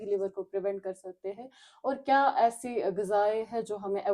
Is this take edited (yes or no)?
no